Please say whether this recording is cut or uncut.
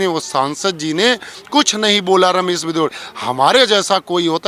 uncut